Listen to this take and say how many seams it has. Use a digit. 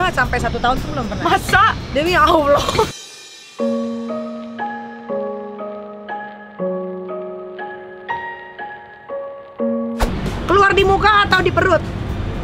1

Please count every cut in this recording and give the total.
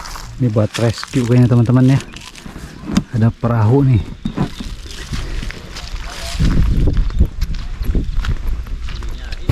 1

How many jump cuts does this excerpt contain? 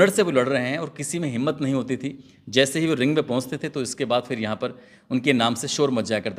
0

